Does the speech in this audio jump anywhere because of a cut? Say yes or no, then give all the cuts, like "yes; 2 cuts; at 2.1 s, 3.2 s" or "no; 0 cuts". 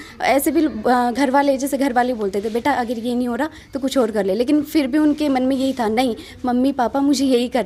no; 0 cuts